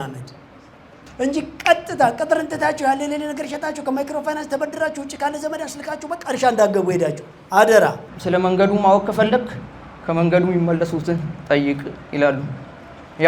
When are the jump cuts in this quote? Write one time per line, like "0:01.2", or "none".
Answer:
0:08.1